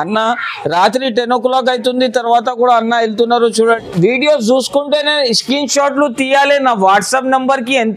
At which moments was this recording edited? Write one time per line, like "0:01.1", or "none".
0:03.8